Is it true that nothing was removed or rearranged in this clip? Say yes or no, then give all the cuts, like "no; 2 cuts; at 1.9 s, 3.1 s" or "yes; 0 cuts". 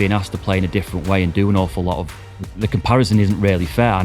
no; 1 cut; at 2.3 s